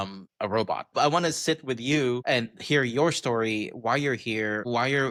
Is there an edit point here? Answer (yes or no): no